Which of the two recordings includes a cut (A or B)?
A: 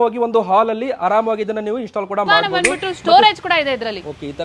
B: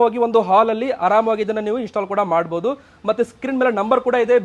A